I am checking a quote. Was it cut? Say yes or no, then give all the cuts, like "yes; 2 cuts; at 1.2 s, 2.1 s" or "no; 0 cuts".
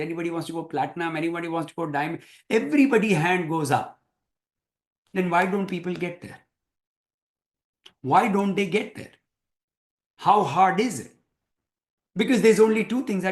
no; 0 cuts